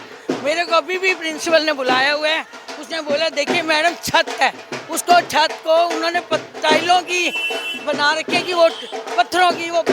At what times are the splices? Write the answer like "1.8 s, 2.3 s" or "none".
none